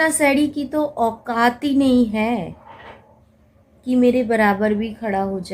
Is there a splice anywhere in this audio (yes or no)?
no